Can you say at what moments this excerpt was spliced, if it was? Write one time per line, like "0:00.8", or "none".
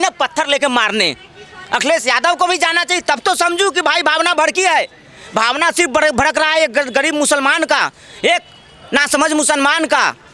none